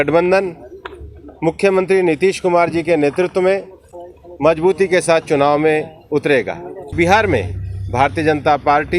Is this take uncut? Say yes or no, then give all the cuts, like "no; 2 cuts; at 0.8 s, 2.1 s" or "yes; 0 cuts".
no; 1 cut; at 6.9 s